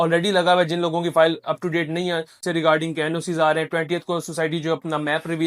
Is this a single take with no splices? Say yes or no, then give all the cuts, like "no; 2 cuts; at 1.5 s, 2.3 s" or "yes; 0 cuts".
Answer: no; 1 cut; at 2.4 s